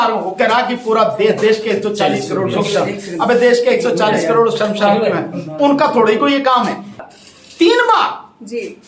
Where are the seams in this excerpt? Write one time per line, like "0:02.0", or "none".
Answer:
0:07.0

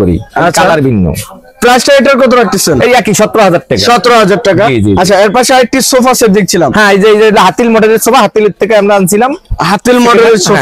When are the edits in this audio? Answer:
none

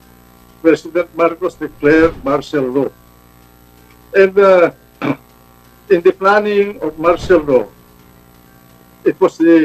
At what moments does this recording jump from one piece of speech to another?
none

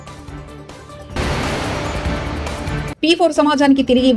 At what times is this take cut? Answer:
none

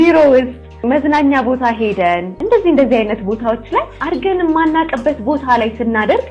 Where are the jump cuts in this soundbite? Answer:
0:00.8
0:02.3
0:04.0

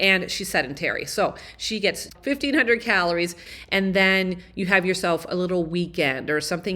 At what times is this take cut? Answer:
0:02.1
0:03.4

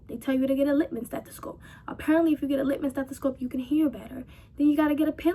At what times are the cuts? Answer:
none

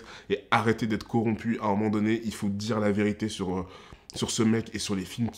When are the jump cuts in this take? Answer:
none

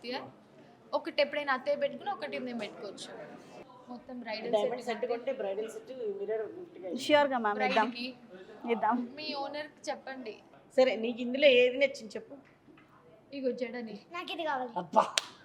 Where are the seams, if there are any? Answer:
0:03.6
0:10.4

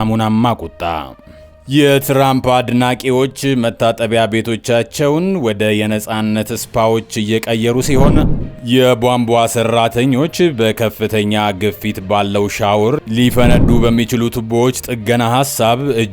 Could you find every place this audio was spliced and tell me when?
0:08.3

